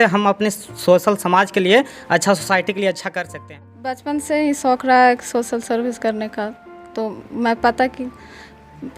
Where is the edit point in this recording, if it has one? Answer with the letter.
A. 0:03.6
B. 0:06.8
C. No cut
A